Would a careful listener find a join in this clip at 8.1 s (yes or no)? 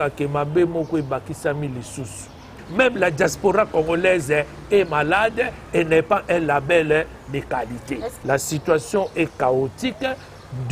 yes